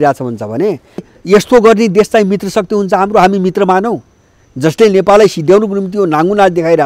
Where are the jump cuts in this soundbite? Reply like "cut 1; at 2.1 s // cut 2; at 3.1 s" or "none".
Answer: cut 1; at 1.1 s